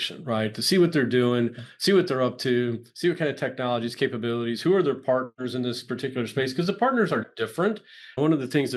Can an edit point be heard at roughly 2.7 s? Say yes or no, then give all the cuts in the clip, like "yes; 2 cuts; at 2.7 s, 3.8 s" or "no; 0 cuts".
no; 0 cuts